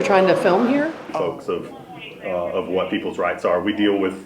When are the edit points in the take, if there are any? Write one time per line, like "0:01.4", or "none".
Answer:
0:01.0

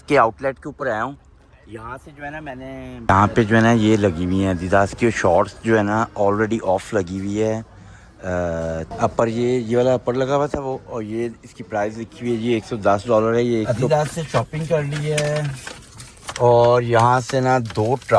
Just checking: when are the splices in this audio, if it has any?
0:03.0
0:08.9
0:13.8

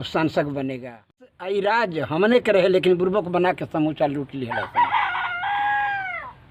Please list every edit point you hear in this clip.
0:01.1

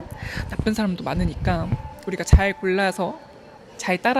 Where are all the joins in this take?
none

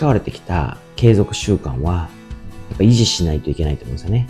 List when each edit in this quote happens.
none

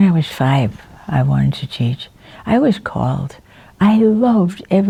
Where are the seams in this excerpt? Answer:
none

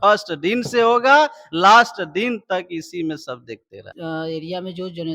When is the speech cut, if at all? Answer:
0:03.9

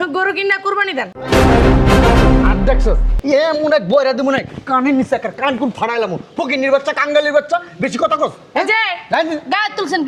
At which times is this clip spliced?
none

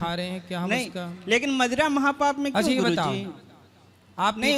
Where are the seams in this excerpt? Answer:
none

